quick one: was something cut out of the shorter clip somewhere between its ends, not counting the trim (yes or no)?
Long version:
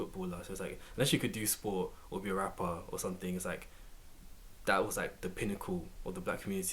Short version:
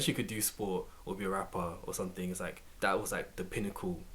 yes